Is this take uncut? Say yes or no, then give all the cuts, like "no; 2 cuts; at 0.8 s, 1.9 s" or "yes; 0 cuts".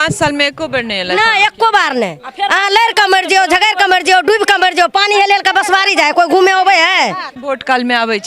no; 1 cut; at 7.3 s